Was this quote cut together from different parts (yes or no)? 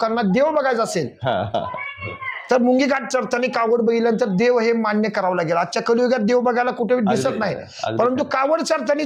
no